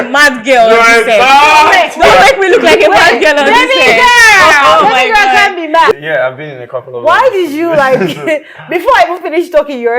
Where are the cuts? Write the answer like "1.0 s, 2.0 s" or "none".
5.9 s